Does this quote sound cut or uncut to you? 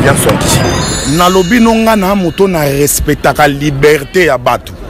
cut